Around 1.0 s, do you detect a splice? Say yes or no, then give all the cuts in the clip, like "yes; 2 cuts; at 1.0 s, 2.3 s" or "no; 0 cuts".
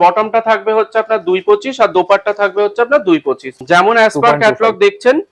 no; 1 cut; at 3.6 s